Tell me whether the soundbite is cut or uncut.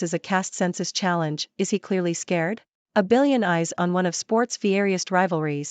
cut